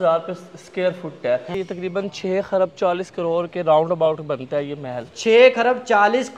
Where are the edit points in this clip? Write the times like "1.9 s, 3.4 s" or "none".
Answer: 1.6 s, 5.0 s